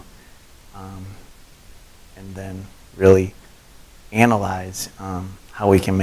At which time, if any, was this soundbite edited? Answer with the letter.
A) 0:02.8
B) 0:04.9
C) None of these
C